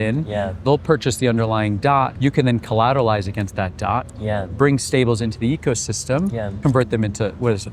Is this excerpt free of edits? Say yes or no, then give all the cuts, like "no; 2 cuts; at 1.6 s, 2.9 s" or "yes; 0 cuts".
no; 2 cuts; at 2.1 s, 6.5 s